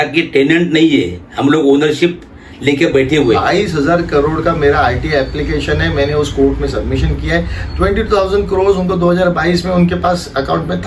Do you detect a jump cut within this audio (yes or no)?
yes